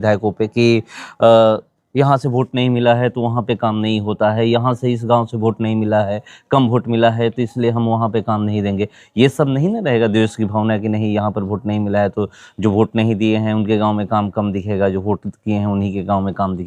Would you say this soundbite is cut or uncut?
uncut